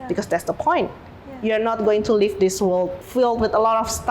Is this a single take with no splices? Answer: no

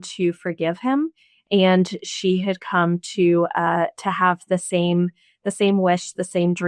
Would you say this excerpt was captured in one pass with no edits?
yes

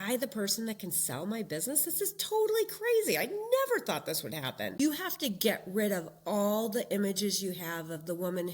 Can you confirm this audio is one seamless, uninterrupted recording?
no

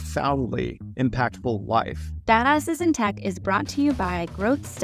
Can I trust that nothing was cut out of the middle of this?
no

